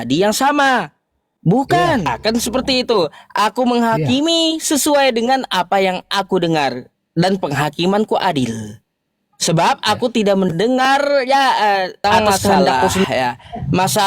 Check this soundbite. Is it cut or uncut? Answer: cut